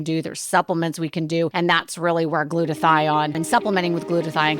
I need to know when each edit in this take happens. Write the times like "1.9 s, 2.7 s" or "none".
1.5 s, 3.4 s